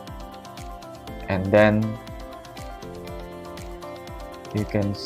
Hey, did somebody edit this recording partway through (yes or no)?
yes